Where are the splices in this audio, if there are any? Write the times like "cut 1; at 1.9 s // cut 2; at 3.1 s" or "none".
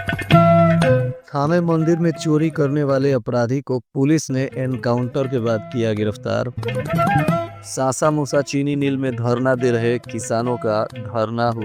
cut 1; at 1.2 s